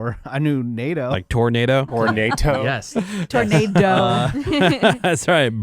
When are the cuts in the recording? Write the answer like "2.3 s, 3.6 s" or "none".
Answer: 1.2 s, 1.9 s